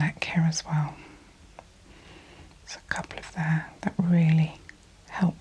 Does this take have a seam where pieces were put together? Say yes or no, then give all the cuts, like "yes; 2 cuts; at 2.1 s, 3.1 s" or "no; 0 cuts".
no; 0 cuts